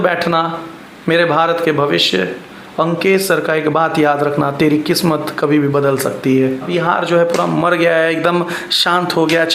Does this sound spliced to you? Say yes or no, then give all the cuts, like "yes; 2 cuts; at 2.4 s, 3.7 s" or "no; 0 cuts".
yes; 1 cut; at 6.7 s